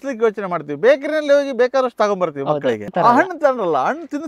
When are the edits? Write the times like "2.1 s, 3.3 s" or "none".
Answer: 2.9 s

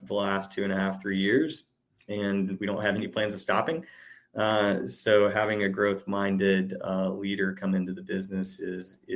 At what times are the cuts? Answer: none

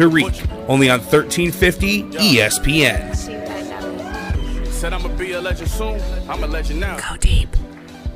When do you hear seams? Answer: none

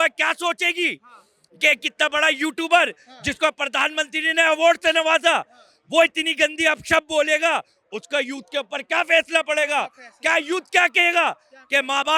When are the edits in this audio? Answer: none

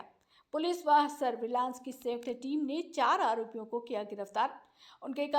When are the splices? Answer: 3.1 s

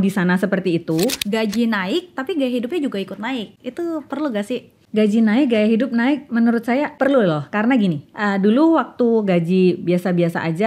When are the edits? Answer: 1.2 s, 3.6 s, 4.8 s, 7.0 s

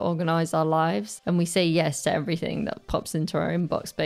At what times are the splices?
1.1 s

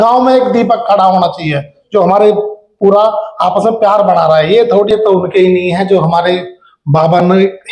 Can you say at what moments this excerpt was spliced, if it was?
4.9 s

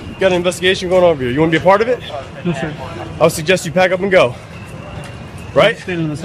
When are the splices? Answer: none

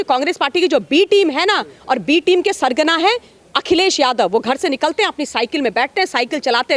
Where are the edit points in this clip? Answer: none

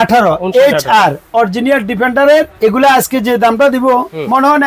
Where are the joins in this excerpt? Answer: 2.5 s

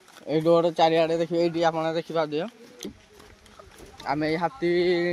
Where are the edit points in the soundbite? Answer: 2.9 s

